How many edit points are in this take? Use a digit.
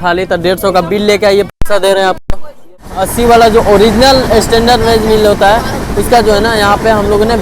1